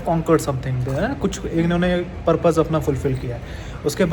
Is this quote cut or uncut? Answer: uncut